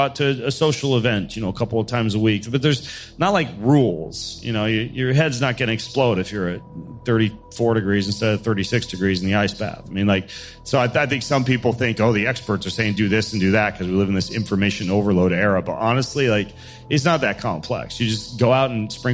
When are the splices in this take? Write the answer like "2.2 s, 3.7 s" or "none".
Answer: none